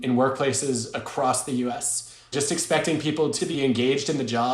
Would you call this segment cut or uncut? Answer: cut